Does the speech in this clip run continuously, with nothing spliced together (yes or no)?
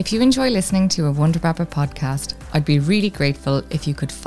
yes